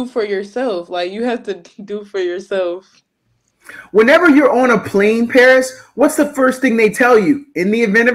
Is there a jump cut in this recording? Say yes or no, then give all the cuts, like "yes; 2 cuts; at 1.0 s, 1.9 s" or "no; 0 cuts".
no; 0 cuts